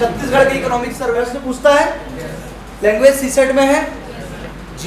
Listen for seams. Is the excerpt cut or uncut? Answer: cut